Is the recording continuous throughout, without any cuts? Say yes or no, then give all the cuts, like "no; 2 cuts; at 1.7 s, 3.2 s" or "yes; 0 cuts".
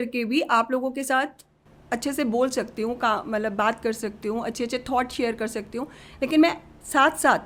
yes; 0 cuts